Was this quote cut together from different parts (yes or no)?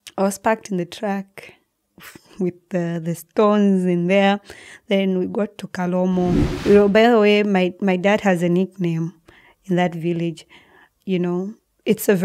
yes